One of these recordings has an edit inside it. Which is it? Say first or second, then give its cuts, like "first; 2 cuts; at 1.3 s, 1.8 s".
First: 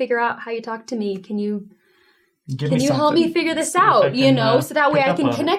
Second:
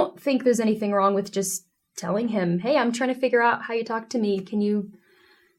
first; 1 cut; at 4.1 s